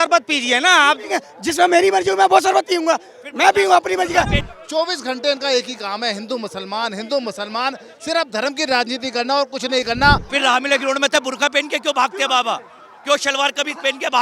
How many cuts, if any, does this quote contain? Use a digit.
2